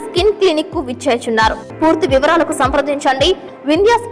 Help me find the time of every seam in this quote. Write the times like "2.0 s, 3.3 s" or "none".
1.7 s